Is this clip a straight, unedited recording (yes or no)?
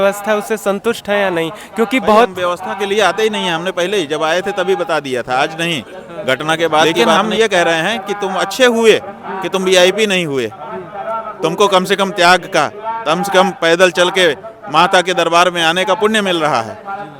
no